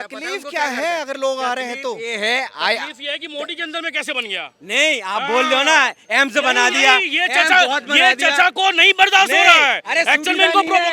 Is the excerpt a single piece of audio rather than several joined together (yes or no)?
yes